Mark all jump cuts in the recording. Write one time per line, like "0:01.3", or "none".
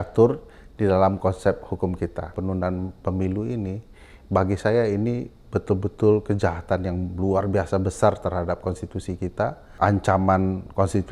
0:02.4
0:09.7